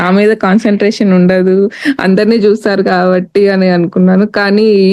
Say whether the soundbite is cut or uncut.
uncut